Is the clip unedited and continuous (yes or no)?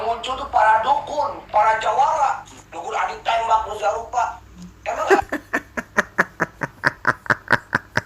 yes